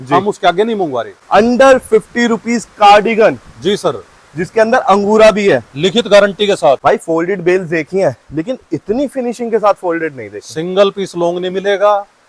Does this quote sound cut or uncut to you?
cut